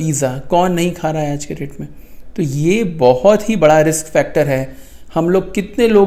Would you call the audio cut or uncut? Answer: uncut